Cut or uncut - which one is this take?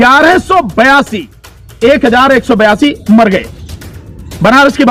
uncut